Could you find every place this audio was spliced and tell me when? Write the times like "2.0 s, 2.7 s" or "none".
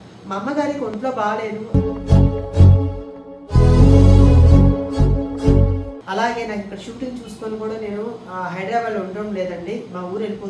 5.9 s